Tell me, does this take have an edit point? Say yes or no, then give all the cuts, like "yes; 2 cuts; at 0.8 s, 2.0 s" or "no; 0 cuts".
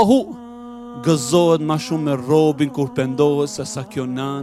no; 0 cuts